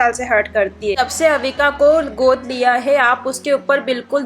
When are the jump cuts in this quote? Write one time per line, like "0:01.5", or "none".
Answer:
0:01.0